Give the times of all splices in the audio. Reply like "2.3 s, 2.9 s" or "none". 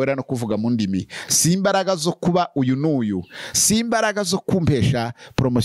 none